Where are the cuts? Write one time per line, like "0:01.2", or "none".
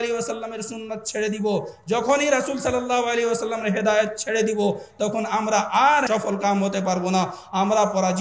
0:06.1